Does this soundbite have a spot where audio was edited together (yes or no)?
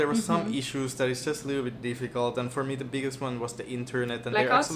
no